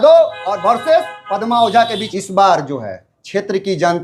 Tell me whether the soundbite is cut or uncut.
cut